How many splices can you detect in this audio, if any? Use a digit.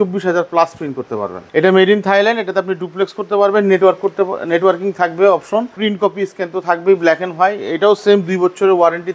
2